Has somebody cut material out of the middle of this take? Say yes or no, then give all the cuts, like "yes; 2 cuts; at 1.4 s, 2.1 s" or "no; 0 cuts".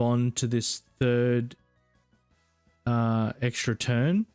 no; 0 cuts